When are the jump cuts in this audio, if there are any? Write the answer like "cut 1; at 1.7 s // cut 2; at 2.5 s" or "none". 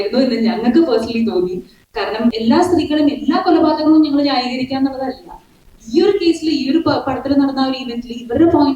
cut 1; at 2.4 s